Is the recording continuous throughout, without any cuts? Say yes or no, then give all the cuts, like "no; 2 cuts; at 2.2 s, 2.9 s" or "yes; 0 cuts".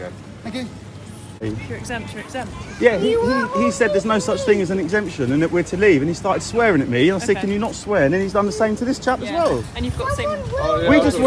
no; 1 cut; at 1.4 s